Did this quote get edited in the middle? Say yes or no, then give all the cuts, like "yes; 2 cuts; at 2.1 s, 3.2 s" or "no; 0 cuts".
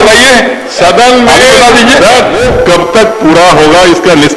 yes; 1 cut; at 2.4 s